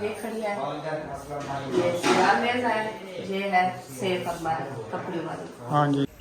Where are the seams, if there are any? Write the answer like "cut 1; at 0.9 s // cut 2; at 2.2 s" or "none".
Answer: none

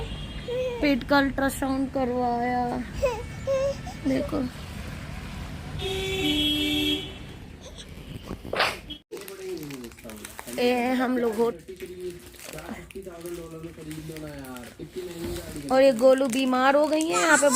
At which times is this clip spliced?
cut 1; at 9.1 s // cut 2; at 11.6 s

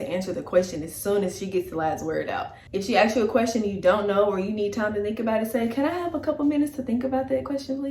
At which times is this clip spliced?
cut 1; at 2.5 s

